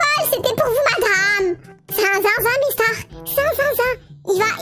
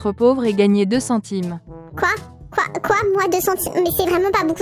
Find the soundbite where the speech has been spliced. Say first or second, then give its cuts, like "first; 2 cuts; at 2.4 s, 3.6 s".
first; 1 cut; at 1.7 s